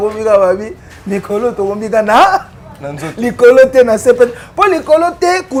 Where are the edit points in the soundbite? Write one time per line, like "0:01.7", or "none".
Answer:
none